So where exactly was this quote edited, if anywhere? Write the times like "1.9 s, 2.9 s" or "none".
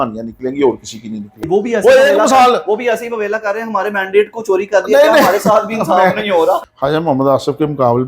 1.4 s, 6.7 s